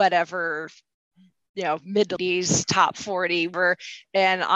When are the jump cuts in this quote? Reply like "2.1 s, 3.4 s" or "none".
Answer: 2.1 s, 3.5 s